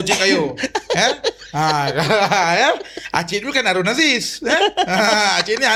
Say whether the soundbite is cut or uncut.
uncut